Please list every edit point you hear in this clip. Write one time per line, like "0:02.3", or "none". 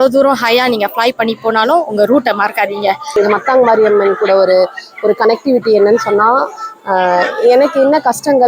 0:03.1